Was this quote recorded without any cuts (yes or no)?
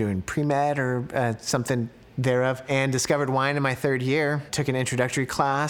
no